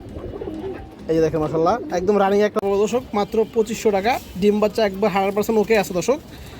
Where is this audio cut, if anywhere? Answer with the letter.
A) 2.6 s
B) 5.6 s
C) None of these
A